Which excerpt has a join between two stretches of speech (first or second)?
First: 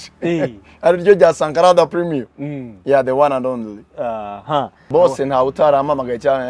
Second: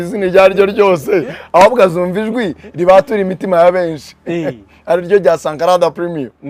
first